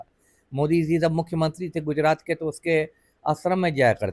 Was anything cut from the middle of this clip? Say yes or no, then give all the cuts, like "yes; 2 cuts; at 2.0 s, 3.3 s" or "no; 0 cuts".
no; 0 cuts